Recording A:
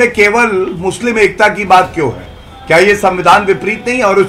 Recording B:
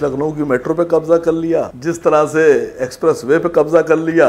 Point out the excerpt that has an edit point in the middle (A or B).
B